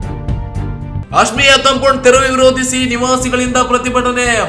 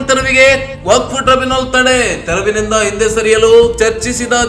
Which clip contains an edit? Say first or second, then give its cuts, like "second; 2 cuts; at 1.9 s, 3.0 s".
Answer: first; 1 cut; at 1.0 s